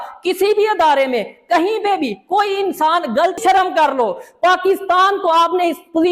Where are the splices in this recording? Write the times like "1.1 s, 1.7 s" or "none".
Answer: 3.4 s